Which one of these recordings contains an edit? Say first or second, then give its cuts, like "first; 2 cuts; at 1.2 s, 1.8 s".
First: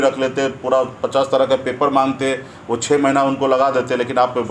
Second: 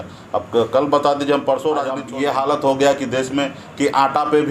second; 1 cut; at 2.1 s